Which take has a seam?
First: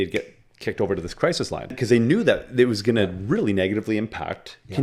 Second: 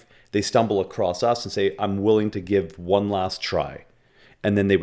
first; 1 cut; at 1.7 s

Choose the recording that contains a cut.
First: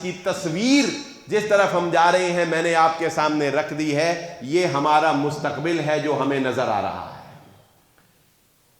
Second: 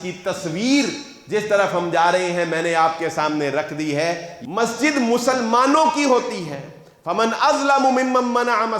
second; 1 cut; at 4.3 s

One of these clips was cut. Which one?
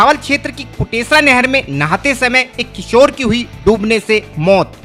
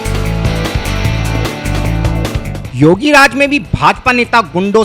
second; 1 cut; at 2.6 s

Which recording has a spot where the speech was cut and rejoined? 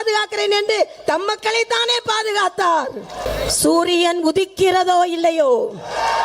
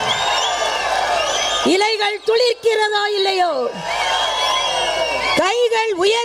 first; 1 cut; at 3.2 s

